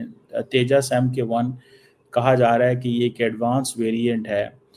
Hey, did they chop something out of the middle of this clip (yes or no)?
no